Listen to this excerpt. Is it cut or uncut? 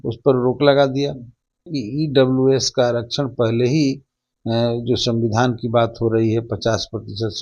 cut